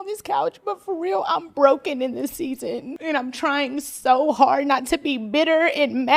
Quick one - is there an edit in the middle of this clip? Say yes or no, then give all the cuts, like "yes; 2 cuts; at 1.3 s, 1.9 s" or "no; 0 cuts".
yes; 1 cut; at 2.9 s